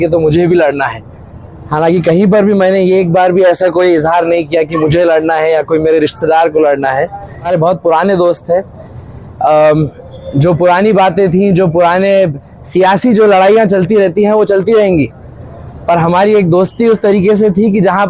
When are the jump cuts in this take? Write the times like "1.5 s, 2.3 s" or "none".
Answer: 7.5 s